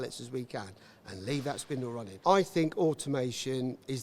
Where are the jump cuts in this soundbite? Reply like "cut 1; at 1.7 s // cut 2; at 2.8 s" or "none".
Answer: cut 1; at 2.1 s